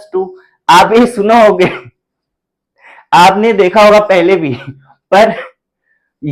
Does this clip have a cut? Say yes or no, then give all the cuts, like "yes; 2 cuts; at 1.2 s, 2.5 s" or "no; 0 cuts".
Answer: no; 0 cuts